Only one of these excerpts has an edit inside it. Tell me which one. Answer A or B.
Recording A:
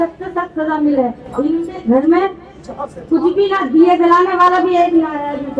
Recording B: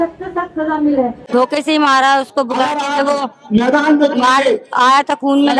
B